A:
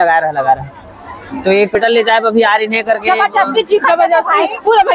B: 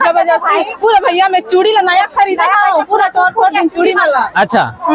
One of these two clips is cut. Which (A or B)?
A